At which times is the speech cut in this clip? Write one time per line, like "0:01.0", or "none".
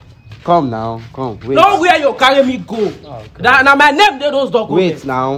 none